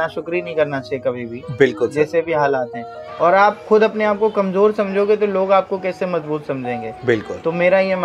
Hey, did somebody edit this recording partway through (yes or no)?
no